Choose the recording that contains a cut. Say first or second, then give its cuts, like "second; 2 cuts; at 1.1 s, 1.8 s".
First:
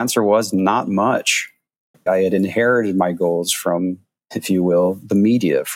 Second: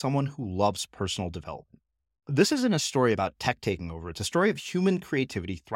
first; 1 cut; at 2.1 s